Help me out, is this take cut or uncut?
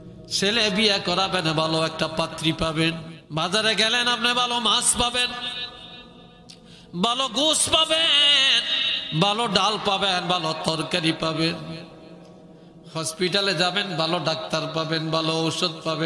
cut